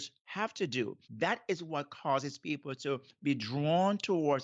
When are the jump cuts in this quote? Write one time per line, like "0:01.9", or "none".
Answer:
0:01.0